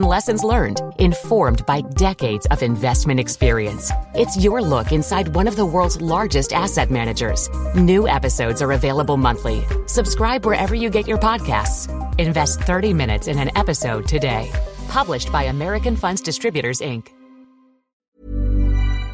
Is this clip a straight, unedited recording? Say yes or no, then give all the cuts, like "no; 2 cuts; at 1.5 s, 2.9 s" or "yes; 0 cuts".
no; 1 cut; at 18.0 s